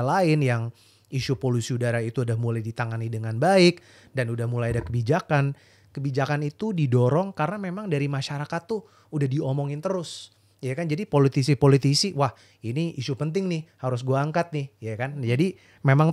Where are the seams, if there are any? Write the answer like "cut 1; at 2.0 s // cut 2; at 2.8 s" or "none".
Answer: none